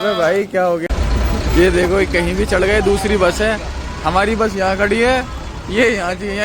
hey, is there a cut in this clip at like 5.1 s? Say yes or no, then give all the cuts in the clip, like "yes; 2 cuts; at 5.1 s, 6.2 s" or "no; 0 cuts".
no; 1 cut; at 1.0 s